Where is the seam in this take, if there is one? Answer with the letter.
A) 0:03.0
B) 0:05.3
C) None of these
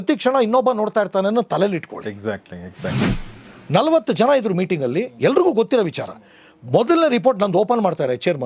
A